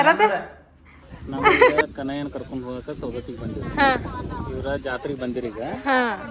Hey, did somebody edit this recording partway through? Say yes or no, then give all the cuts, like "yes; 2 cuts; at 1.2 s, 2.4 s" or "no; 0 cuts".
yes; 1 cut; at 1.8 s